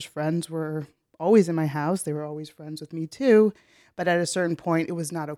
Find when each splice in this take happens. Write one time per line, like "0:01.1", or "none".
none